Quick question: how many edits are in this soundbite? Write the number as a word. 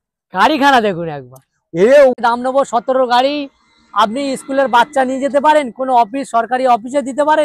one